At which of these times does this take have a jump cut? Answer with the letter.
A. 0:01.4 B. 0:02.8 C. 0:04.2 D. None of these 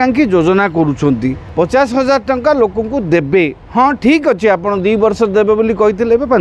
A